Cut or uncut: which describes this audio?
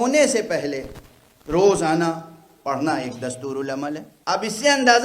cut